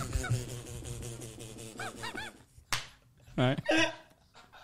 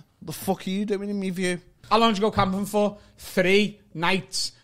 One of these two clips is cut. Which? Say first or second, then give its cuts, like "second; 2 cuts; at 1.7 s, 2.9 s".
second; 1 cut; at 1.8 s